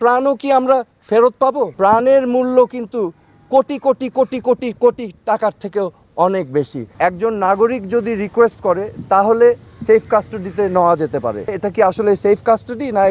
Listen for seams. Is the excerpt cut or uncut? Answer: cut